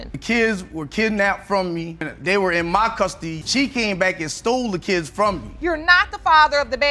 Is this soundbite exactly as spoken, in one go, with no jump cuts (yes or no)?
no